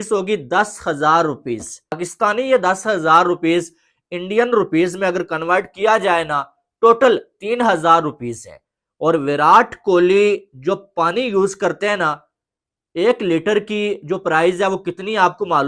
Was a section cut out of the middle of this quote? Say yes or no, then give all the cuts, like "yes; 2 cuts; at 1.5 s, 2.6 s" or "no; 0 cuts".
yes; 1 cut; at 2.0 s